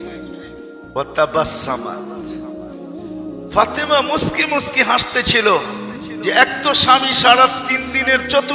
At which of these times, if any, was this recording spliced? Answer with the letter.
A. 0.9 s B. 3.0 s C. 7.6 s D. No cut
A